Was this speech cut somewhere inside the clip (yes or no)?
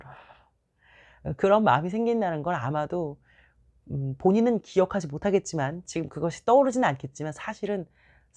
no